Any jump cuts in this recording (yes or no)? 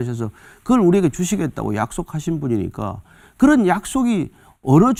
no